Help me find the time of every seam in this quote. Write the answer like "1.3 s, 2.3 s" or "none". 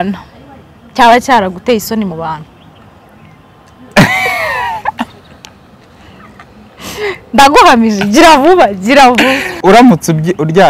9.4 s

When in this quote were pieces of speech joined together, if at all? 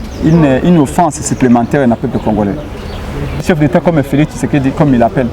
3.4 s

